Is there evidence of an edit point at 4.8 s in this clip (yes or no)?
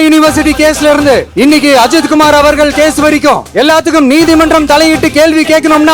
no